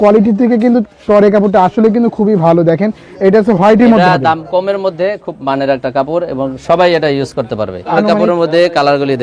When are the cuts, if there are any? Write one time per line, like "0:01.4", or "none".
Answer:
0:07.9